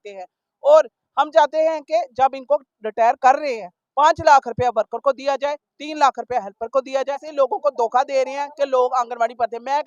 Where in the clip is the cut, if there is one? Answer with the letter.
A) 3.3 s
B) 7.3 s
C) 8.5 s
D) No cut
B